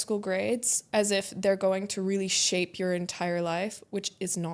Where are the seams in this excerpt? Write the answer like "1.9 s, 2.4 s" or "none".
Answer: none